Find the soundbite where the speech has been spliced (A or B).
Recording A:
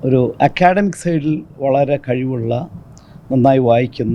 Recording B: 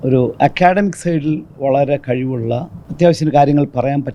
B